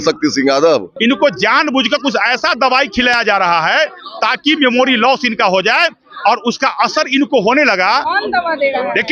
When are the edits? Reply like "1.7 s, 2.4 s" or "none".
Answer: 0.9 s, 8.0 s